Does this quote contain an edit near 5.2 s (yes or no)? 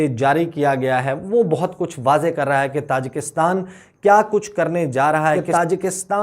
yes